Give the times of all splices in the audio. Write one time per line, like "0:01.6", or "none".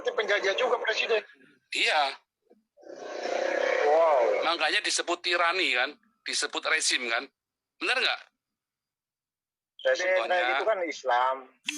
0:10.0